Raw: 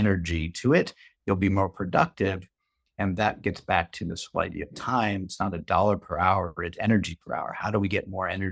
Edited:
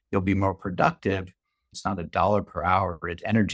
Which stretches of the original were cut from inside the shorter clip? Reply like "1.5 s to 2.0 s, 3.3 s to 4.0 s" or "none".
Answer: 2.9 s to 5.3 s